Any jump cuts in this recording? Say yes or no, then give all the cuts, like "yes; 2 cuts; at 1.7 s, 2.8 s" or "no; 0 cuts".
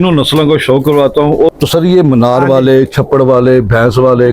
yes; 1 cut; at 1.5 s